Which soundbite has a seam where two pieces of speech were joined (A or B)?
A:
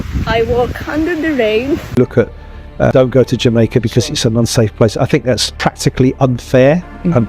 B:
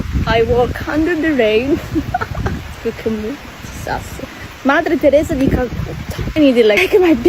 A